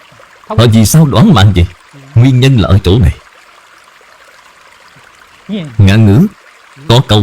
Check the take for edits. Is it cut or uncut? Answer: cut